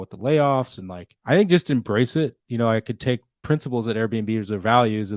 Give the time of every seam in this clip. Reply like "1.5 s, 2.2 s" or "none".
3.4 s